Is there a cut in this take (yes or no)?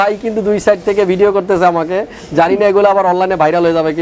no